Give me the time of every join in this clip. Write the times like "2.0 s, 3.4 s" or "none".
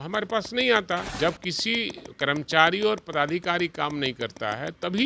1.1 s